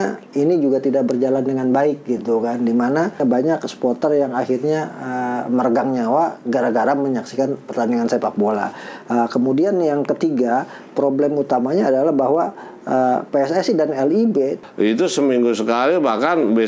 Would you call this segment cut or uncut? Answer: cut